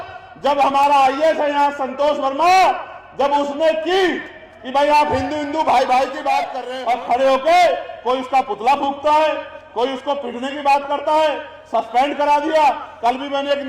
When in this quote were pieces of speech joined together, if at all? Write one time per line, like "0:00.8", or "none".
0:06.6